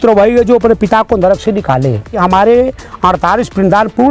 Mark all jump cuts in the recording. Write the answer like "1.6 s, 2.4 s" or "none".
2.1 s